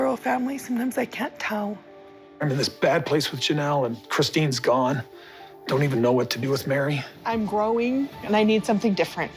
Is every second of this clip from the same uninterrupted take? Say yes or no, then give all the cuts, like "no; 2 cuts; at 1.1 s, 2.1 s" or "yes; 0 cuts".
yes; 0 cuts